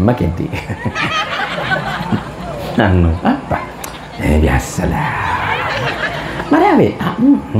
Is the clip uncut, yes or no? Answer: yes